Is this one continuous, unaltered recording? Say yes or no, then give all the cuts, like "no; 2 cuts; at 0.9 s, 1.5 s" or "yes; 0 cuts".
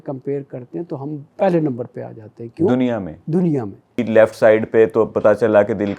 no; 2 cuts; at 1.3 s, 4.0 s